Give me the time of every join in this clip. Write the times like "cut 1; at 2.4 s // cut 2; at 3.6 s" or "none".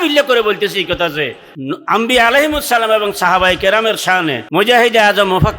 cut 1; at 1.5 s // cut 2; at 4.4 s